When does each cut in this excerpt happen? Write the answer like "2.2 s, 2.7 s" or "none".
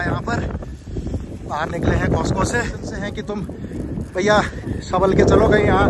3.2 s